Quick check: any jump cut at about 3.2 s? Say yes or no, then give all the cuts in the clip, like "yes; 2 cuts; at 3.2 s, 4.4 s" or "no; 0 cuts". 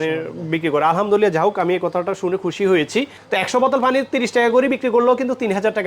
yes; 1 cut; at 3.2 s